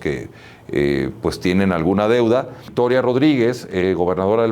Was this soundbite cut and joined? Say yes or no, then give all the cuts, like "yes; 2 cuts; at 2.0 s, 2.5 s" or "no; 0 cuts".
yes; 1 cut; at 2.6 s